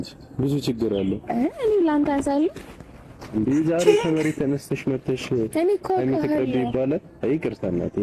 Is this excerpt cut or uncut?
uncut